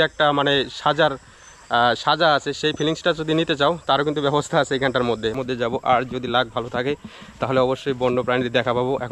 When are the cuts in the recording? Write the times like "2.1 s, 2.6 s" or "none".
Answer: 5.3 s

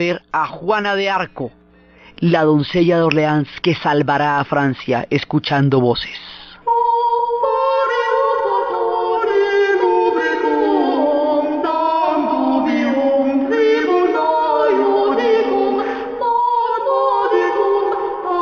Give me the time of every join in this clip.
none

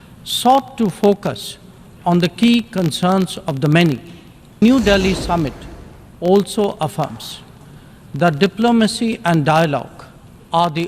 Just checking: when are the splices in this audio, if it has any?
4.6 s

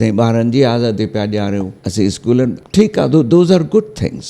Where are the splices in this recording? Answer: 1.8 s, 2.6 s

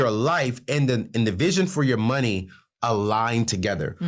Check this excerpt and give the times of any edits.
none

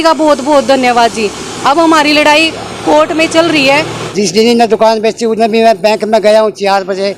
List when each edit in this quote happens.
4.0 s

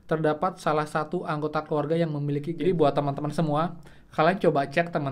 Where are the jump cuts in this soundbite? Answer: 2.5 s

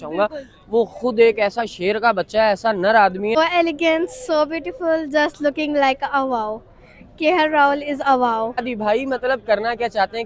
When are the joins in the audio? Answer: 3.4 s, 8.7 s

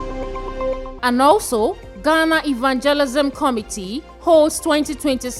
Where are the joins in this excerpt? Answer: 0.9 s

